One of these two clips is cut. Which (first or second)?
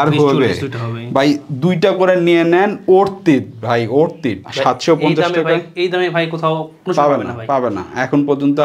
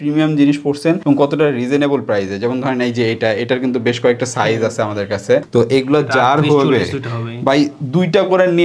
second